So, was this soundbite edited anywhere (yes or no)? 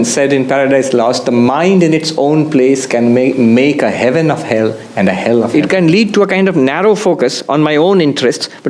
yes